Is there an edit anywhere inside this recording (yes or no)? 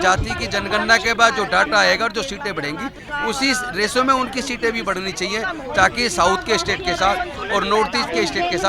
no